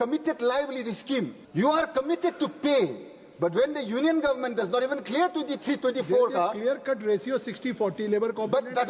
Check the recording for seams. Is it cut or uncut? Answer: cut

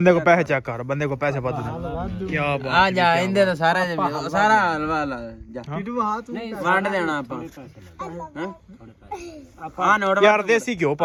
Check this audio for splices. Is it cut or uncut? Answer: uncut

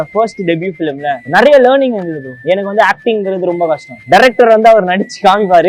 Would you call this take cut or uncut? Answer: cut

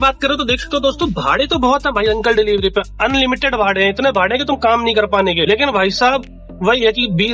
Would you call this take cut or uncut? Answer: uncut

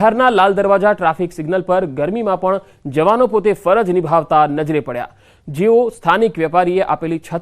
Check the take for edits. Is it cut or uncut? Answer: cut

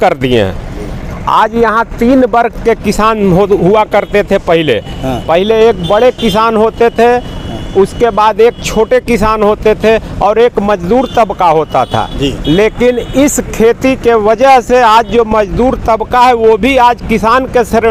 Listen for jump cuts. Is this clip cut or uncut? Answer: uncut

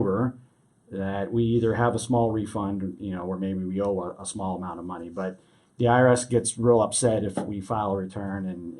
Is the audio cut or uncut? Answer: uncut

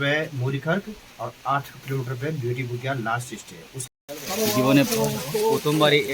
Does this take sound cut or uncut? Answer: cut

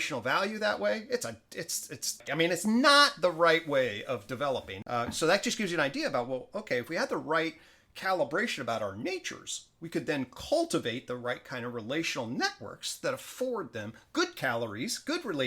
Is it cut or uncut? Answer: cut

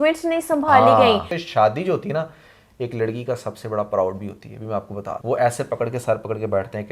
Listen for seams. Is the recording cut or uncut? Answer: cut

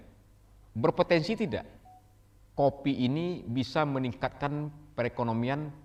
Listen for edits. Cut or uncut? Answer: uncut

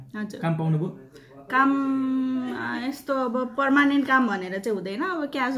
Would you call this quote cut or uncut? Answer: uncut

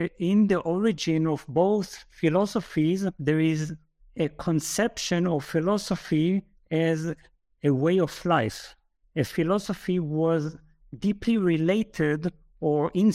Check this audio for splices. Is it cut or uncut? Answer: cut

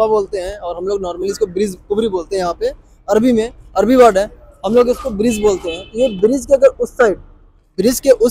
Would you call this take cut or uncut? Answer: uncut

